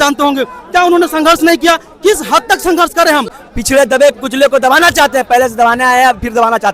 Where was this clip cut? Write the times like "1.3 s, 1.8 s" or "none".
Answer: 3.5 s